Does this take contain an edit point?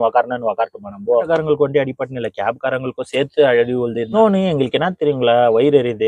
yes; 2 cuts; at 1.3 s, 4.1 s

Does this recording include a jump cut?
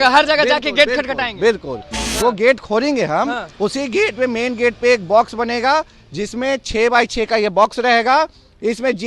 yes; 1 cut; at 2.0 s

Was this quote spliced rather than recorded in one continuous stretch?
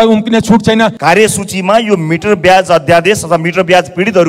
yes; 1 cut; at 1.0 s

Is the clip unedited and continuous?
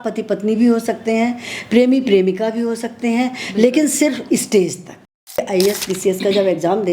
no; 1 cut; at 5.4 s

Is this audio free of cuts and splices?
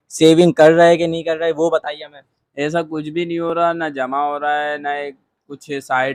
yes; 0 cuts

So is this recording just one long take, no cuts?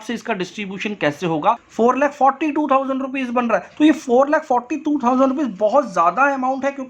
no; 1 cut; at 1.7 s

